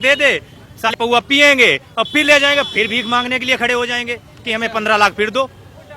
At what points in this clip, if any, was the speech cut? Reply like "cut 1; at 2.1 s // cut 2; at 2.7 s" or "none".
cut 1; at 0.9 s